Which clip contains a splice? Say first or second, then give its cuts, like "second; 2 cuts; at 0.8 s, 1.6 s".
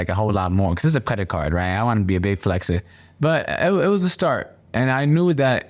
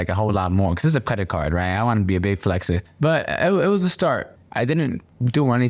second; 2 cuts; at 2.9 s, 4.4 s